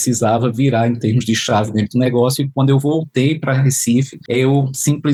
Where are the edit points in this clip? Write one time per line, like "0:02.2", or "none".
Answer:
none